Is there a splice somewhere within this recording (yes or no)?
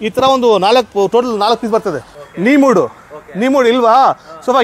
yes